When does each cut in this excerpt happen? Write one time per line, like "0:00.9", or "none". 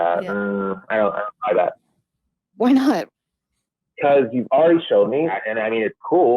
0:05.4